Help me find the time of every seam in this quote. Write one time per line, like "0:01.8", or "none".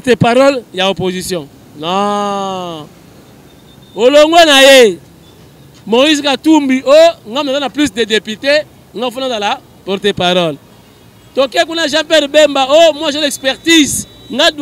none

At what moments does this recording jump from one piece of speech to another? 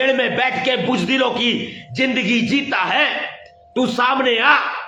none

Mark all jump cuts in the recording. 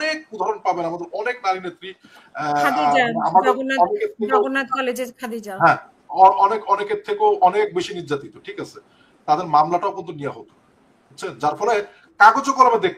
none

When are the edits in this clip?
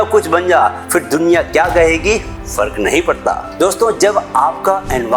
0:02.4
0:03.5

